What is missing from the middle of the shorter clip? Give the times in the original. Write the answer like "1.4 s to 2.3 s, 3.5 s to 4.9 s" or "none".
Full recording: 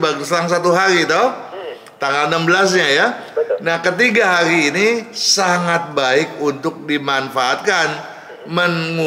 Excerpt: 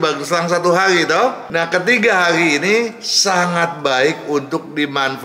1.5 s to 3.6 s